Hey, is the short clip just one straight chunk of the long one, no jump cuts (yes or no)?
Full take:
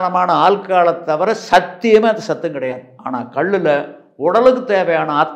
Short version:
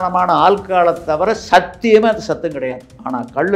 yes